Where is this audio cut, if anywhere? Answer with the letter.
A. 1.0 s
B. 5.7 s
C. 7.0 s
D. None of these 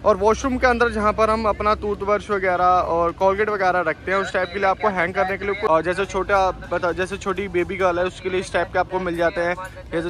B